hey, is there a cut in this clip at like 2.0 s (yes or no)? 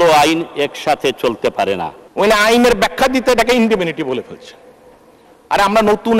yes